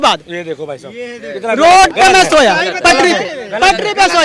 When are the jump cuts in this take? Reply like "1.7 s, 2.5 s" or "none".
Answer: none